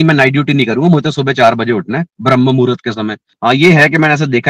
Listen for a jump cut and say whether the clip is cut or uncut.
cut